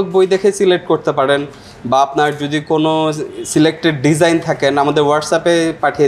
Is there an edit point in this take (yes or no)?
no